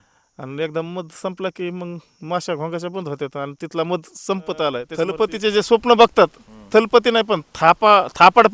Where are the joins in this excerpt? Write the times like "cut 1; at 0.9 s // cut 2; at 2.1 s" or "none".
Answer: cut 1; at 5.0 s